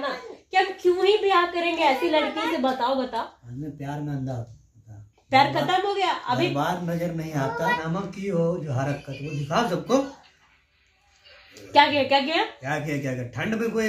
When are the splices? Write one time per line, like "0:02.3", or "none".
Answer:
0:07.8